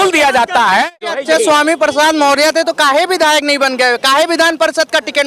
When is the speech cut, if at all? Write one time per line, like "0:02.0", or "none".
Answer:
0:01.1